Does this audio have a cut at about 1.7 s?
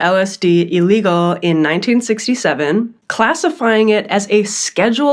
no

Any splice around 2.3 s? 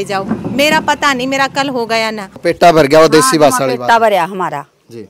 yes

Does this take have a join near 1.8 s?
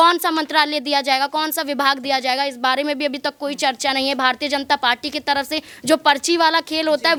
no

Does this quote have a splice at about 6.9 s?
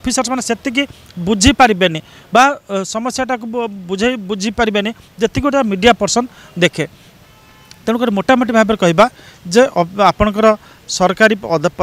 no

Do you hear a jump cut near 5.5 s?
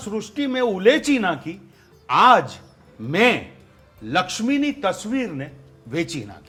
no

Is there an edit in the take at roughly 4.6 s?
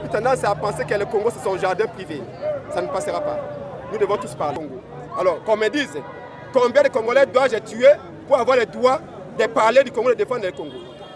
yes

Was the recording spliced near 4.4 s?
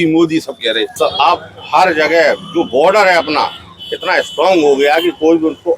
no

